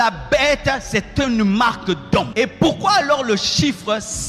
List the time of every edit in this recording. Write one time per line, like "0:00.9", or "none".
0:02.3